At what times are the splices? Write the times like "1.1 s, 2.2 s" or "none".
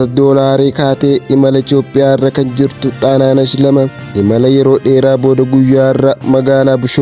4.0 s

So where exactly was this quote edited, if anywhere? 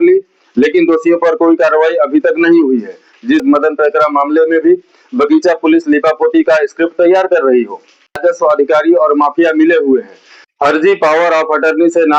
3.4 s, 8.2 s

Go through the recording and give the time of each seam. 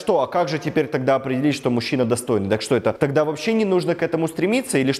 none

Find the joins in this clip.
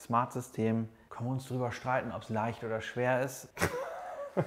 1.1 s, 3.4 s

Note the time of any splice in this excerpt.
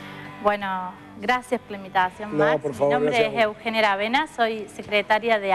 none

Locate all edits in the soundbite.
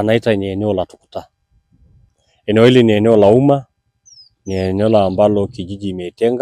2.0 s

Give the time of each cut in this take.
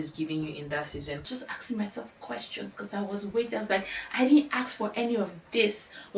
1.2 s

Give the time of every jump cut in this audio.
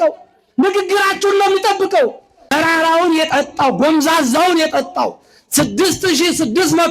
2.5 s

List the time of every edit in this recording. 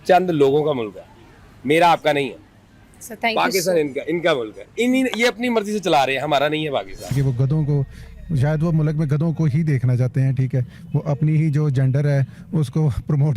7.1 s

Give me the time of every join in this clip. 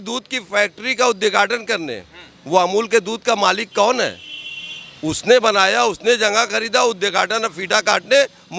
none

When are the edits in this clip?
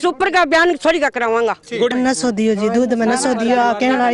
1.9 s

